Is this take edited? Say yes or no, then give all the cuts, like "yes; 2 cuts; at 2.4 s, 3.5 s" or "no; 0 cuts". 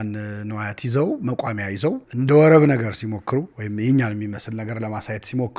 yes; 2 cuts; at 2.1 s, 3.6 s